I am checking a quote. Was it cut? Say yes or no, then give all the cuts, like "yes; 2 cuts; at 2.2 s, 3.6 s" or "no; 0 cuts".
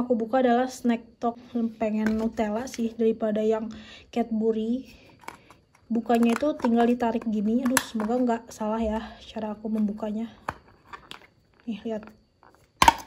yes; 1 cut; at 1.4 s